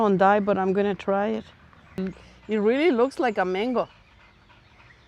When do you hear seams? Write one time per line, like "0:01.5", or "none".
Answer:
0:02.0